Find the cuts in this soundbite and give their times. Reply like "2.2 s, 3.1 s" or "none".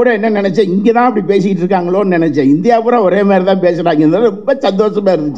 none